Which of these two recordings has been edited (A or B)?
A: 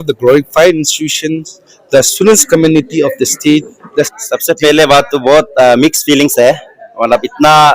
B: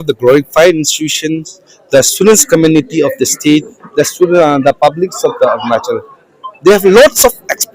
A